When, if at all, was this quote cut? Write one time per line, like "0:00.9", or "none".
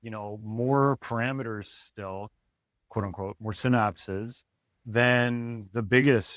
none